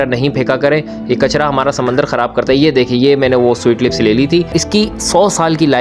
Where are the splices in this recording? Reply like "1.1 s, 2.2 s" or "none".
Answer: 4.6 s